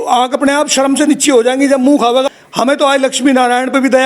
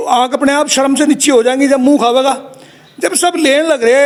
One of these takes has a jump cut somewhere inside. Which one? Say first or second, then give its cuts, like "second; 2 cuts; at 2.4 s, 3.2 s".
first; 1 cut; at 2.4 s